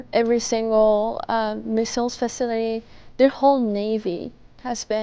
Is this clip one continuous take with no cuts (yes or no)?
yes